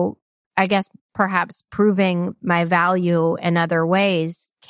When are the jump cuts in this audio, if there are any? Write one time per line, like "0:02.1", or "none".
0:01.7